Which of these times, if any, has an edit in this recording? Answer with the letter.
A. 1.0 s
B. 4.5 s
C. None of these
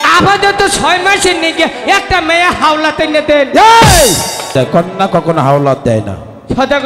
B